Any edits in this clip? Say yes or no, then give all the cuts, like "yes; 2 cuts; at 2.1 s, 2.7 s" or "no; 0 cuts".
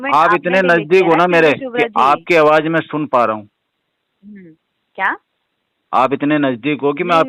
no; 0 cuts